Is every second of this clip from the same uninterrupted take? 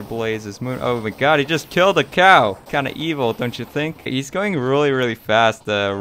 no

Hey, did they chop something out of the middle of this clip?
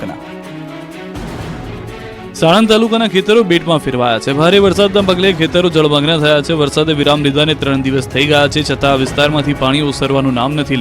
yes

